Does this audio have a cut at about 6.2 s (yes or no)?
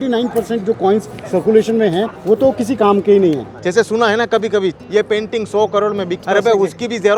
yes